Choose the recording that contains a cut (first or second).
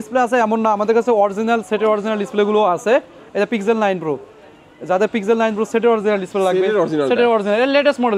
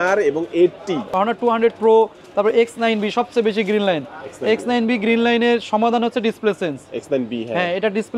second